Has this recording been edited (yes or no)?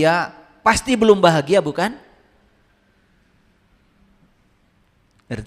no